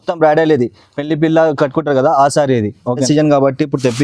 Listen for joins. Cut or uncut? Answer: cut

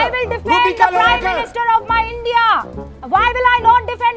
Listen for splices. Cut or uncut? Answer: uncut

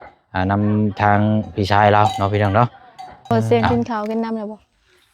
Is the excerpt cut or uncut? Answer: cut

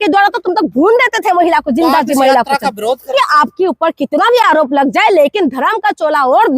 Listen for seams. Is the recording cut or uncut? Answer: cut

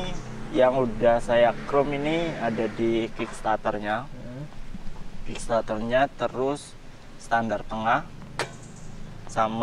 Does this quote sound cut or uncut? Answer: uncut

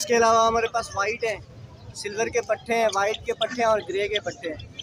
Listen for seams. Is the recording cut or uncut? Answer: uncut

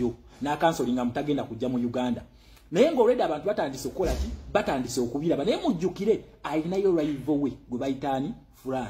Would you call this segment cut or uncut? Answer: uncut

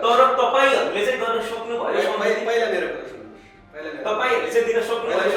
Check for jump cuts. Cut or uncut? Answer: uncut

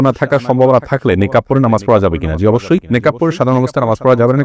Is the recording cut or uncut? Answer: uncut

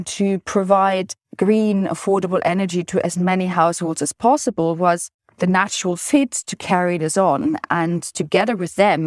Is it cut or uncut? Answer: uncut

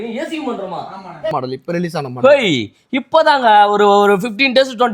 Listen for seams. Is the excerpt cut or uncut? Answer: cut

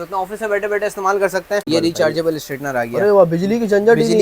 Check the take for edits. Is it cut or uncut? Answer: cut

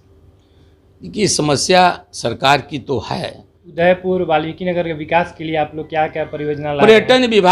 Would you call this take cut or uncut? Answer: cut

